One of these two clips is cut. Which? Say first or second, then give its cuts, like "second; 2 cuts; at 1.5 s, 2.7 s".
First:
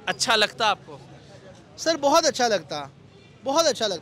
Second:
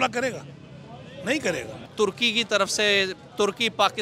second; 1 cut; at 1.9 s